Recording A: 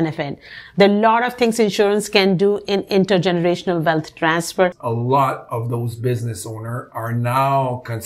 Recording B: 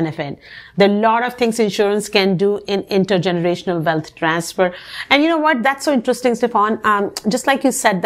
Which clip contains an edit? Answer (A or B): A